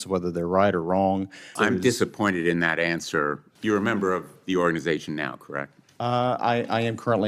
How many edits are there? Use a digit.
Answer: 2